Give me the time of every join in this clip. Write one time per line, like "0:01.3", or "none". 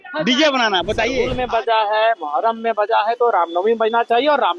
0:01.0